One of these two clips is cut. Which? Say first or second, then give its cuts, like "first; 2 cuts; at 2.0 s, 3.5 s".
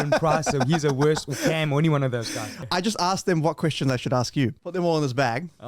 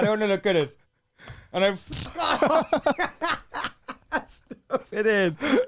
first; 2 cuts; at 2.6 s, 4.6 s